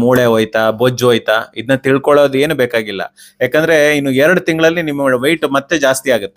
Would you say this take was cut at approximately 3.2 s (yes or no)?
no